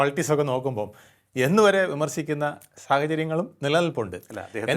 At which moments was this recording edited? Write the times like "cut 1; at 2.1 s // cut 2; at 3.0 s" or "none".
none

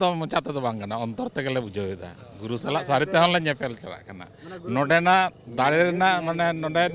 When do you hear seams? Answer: none

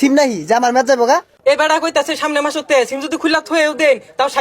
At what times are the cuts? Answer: cut 1; at 1.3 s

